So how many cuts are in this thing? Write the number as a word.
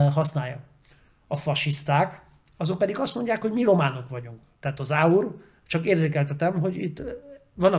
zero